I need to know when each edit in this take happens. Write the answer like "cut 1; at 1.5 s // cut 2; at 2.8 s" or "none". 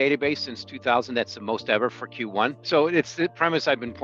cut 1; at 2.6 s